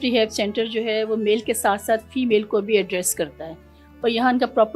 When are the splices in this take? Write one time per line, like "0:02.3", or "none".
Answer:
none